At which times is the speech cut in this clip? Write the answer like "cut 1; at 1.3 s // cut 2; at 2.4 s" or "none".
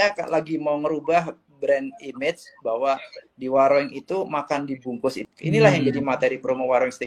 cut 1; at 5.2 s